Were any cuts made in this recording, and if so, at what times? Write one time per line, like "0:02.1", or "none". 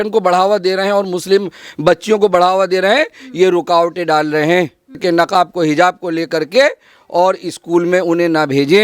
0:05.0